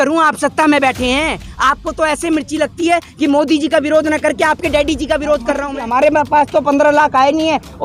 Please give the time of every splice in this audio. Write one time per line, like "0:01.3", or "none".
0:05.9

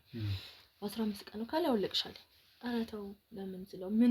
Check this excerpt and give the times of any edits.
none

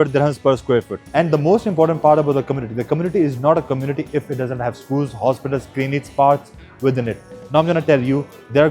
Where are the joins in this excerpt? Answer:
0:01.0

